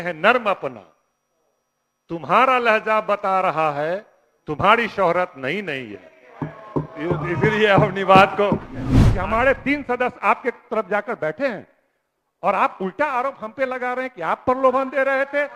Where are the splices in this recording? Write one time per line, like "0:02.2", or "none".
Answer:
0:09.0

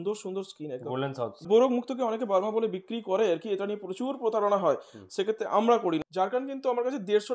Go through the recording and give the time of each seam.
0:01.4
0:06.0

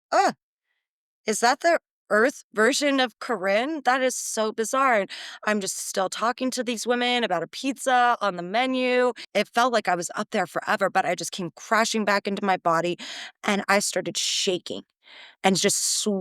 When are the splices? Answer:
0:09.3

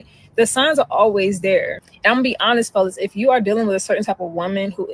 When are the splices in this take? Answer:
0:04.0

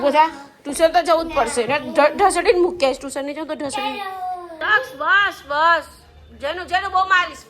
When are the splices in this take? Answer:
0:04.6

